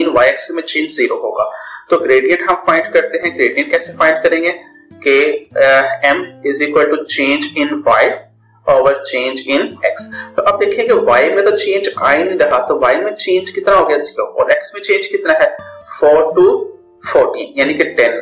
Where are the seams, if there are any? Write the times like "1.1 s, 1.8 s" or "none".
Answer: none